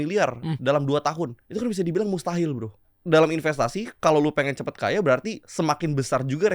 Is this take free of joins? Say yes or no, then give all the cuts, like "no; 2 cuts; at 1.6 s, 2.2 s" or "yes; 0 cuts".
no; 3 cuts; at 1.4 s, 2.9 s, 5.4 s